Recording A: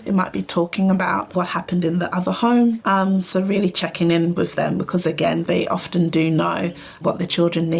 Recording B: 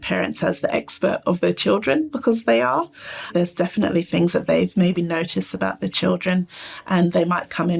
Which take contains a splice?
A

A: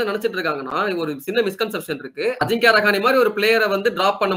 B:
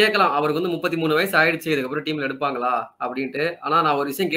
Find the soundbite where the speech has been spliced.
A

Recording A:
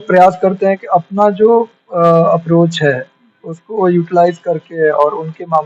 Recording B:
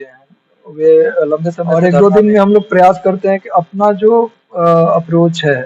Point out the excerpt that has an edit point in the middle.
B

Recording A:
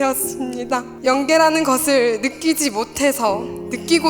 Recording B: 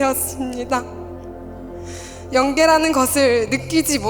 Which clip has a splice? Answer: A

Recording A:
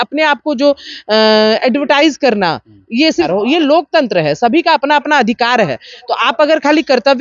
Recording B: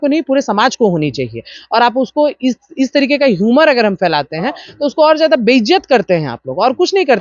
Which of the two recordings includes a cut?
A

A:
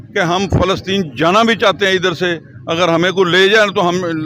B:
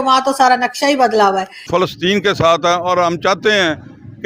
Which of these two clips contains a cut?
B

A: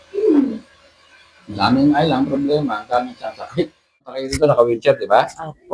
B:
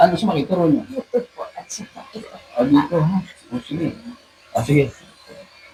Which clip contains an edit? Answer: A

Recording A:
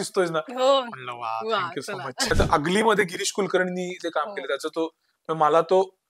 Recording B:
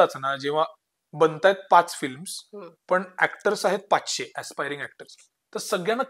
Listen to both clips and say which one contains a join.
A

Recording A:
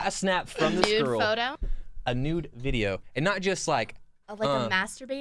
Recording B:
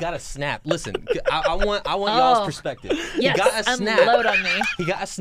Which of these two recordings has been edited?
A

